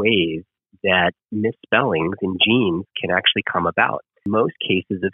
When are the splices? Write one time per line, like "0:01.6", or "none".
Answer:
0:04.2